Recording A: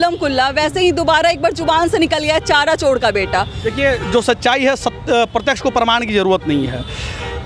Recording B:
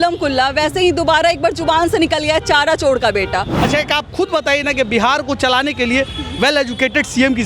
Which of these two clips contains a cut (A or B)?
B